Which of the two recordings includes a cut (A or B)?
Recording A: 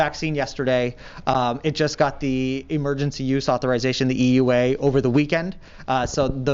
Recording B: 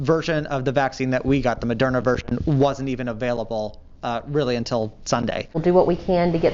B